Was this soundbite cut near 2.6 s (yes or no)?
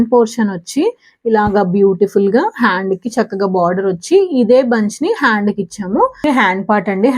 no